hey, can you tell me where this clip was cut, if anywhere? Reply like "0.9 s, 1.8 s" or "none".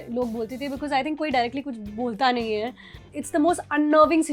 3.1 s